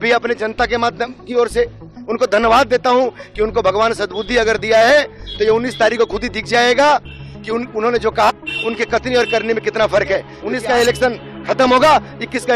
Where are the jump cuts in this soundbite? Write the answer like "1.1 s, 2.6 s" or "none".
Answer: 10.4 s